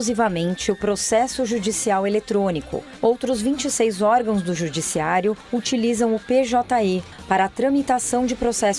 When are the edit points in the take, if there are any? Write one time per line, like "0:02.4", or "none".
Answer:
0:07.1